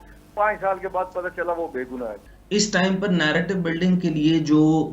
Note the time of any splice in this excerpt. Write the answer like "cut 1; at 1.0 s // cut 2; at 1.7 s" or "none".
cut 1; at 2.1 s